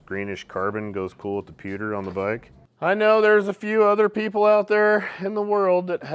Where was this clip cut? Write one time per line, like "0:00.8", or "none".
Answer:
0:02.6